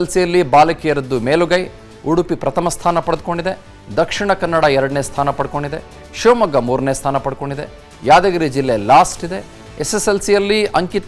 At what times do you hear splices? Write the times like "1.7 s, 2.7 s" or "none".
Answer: none